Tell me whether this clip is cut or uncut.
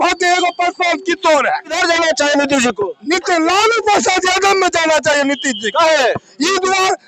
cut